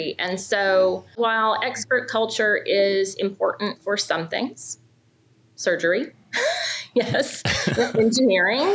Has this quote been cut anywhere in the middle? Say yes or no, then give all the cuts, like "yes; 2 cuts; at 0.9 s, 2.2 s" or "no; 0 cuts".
yes; 1 cut; at 1.1 s